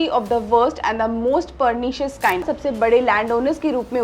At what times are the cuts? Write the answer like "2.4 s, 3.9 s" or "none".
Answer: 2.5 s